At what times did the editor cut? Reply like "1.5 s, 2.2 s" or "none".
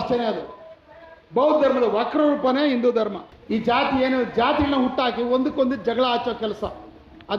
3.3 s